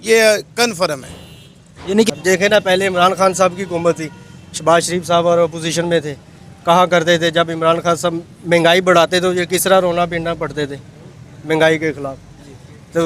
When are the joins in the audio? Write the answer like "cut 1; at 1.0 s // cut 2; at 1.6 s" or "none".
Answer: cut 1; at 2.1 s